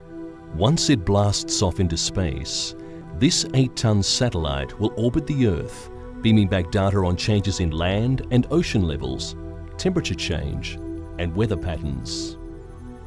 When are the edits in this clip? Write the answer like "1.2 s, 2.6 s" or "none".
7.2 s